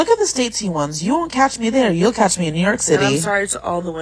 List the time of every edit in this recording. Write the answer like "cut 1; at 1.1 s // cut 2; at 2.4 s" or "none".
cut 1; at 1.5 s // cut 2; at 3.2 s